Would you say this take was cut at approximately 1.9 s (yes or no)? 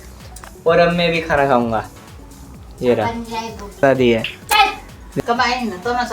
no